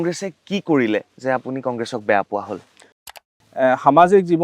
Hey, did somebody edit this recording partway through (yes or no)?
yes